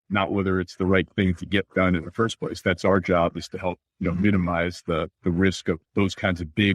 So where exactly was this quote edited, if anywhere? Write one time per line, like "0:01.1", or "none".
0:03.9
0:05.1
0:05.8